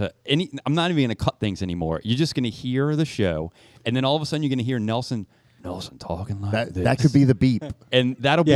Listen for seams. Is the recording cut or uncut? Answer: uncut